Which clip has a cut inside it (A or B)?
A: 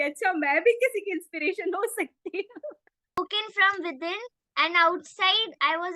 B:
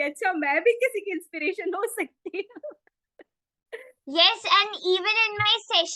A